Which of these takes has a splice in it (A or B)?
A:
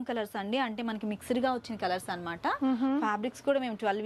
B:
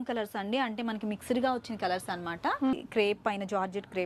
B